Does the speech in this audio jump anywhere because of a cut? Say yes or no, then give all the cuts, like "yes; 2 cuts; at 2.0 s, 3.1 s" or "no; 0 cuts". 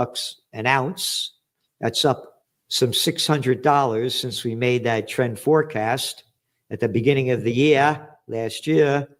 no; 0 cuts